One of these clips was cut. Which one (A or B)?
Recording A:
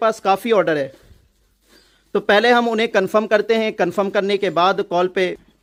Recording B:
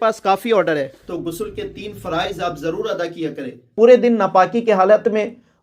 B